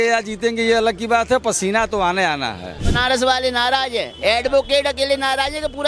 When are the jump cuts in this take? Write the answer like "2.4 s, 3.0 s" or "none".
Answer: 2.9 s